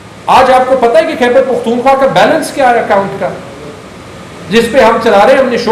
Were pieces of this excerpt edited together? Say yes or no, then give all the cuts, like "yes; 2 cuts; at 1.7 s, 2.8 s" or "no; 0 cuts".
no; 0 cuts